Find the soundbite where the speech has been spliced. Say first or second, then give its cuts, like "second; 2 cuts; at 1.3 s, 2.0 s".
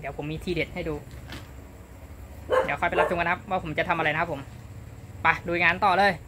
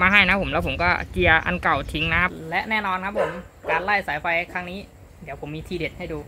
second; 1 cut; at 2.4 s